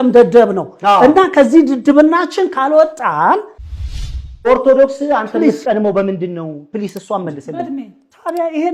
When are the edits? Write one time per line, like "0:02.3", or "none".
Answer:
0:03.8